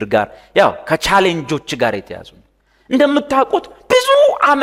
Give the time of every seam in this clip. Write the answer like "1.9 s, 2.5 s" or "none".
none